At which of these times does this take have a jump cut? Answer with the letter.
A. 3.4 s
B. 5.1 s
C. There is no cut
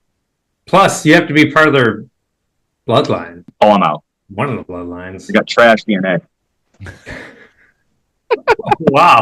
A